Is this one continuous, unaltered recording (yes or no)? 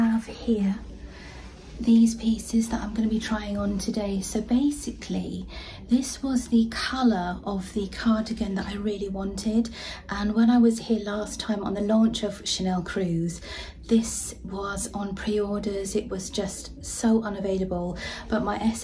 yes